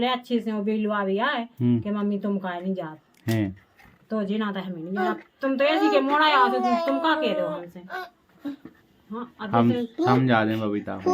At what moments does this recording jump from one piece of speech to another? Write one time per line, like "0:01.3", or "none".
none

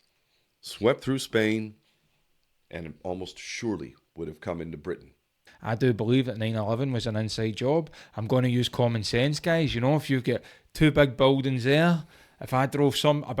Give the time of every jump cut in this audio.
0:05.4

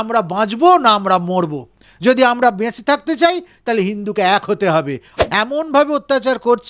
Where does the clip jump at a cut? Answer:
0:05.0

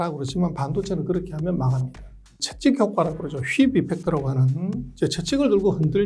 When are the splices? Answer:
0:02.3

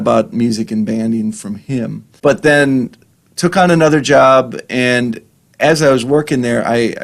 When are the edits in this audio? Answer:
0:02.0

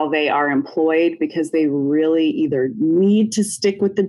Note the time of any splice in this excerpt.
none

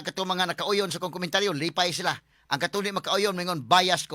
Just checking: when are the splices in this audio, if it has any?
none

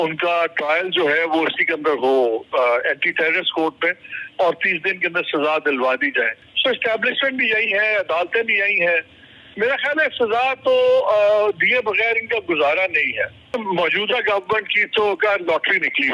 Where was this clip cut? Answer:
0:06.4
0:13.5

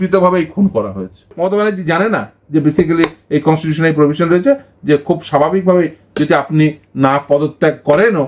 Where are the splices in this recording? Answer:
0:01.3

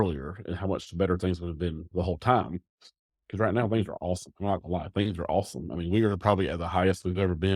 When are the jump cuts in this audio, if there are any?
none

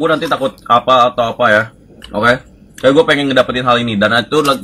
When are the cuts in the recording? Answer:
none

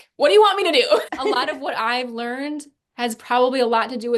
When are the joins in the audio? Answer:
0:01.0

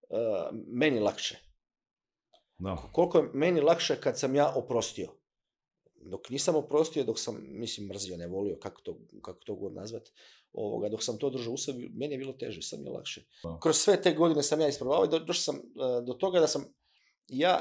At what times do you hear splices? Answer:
0:13.5

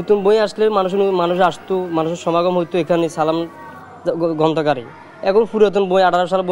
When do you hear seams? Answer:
none

